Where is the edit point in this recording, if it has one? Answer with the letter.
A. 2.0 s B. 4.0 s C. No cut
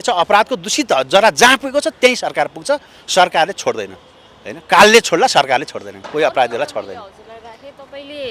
C